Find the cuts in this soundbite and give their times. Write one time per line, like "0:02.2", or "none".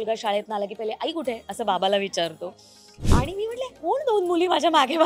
0:02.9

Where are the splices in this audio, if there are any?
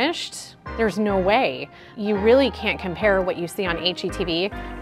0:01.9

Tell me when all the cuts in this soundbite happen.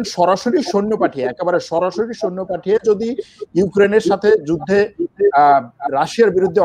none

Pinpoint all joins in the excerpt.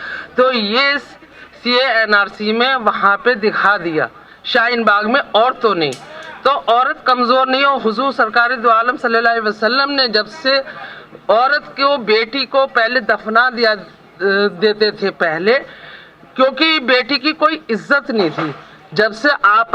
none

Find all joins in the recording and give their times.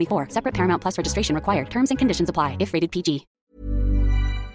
0:03.4

